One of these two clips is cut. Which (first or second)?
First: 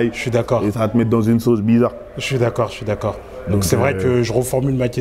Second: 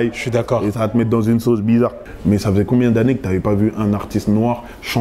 second